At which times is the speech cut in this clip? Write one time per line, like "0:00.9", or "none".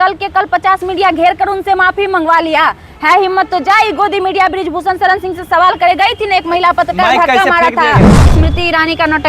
0:08.3